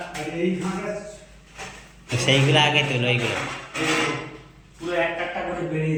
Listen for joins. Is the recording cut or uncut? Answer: uncut